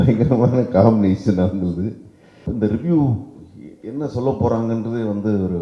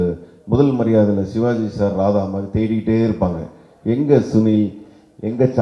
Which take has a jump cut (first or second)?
first